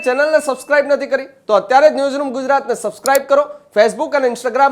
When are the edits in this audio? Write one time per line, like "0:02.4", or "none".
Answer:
none